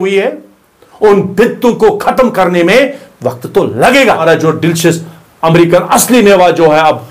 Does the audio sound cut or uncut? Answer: cut